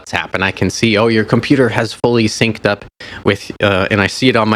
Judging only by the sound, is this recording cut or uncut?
uncut